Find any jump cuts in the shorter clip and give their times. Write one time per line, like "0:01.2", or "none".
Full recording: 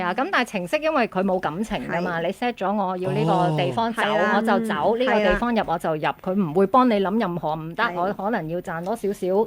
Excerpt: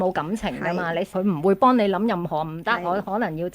0:01.1

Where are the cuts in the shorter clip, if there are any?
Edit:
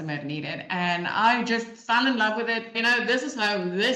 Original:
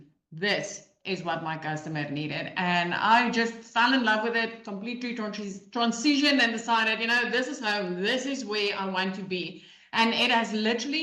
0:02.8

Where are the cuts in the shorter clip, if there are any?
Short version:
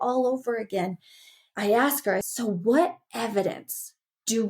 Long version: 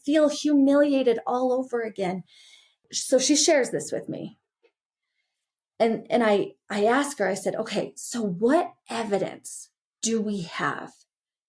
0:01.5
0:02.3

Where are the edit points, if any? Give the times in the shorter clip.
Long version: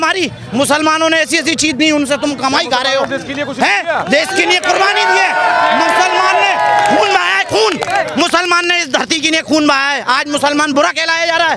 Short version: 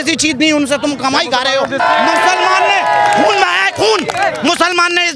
0:01.8

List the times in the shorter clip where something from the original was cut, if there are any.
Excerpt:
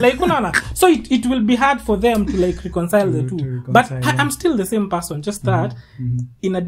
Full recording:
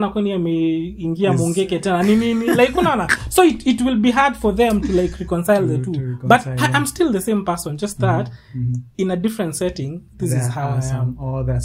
none

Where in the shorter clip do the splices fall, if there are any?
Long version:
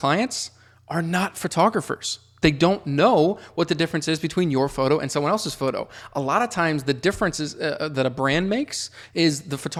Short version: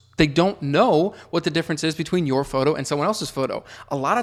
none

